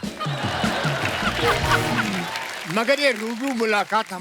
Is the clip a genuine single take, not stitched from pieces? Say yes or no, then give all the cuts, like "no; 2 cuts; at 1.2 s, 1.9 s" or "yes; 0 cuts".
no; 1 cut; at 2.6 s